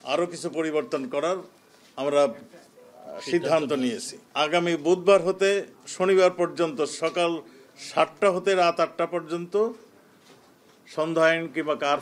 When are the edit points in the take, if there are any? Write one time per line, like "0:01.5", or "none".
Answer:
none